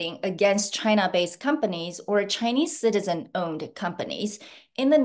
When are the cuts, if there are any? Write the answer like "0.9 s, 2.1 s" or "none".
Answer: none